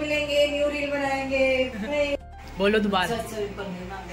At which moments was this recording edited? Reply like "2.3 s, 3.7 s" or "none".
2.2 s